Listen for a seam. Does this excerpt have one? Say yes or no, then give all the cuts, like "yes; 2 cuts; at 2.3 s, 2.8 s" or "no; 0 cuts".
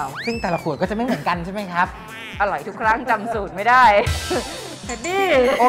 no; 0 cuts